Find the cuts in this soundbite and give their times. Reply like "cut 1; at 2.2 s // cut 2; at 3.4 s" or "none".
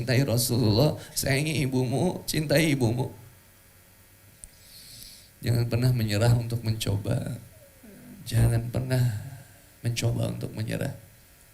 cut 1; at 4.3 s